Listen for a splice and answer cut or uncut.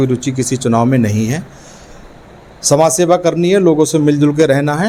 uncut